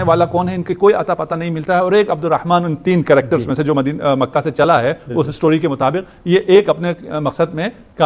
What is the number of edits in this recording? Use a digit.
0